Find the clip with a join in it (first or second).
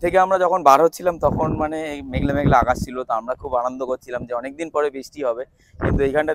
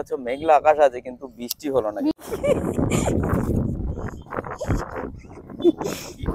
second